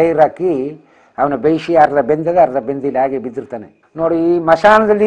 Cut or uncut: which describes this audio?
cut